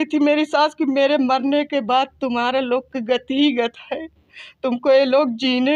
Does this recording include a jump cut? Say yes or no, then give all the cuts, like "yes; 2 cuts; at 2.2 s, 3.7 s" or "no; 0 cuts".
no; 0 cuts